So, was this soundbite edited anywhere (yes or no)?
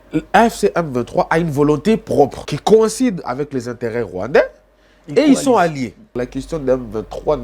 yes